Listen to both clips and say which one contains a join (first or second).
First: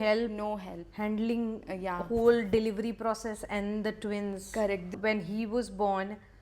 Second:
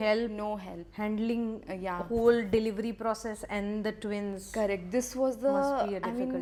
first